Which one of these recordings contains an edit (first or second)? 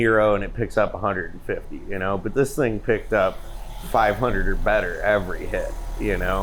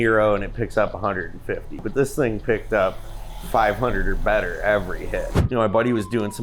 second